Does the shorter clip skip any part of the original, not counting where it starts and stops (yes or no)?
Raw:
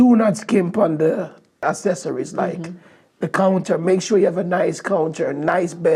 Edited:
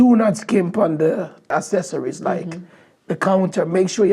yes